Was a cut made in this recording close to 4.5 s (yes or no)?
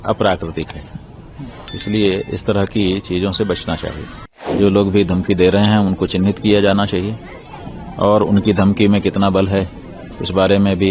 yes